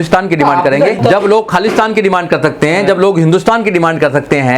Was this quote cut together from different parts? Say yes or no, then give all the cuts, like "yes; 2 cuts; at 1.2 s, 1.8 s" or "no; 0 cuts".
yes; 1 cut; at 1.0 s